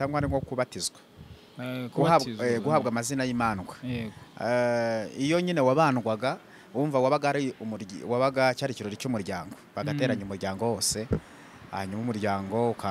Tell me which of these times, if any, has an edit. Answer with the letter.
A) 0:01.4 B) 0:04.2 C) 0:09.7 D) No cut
D